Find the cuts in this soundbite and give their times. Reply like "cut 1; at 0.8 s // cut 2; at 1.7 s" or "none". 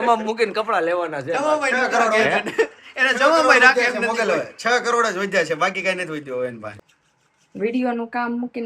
cut 1; at 6.7 s